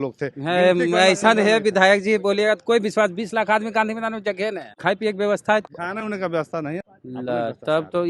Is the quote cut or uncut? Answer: cut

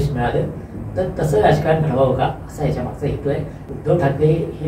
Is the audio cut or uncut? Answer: cut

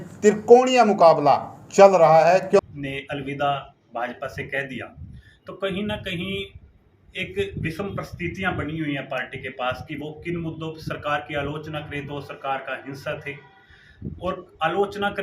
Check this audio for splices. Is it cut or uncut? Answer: cut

